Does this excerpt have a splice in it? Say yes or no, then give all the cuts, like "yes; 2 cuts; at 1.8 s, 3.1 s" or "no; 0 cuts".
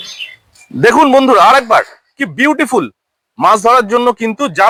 no; 0 cuts